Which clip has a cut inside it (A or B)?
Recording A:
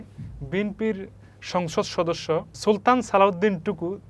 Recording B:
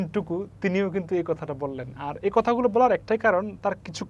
A